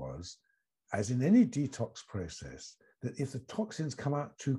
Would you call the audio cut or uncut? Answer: uncut